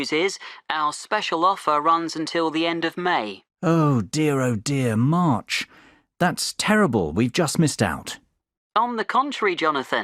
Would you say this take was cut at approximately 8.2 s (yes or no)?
no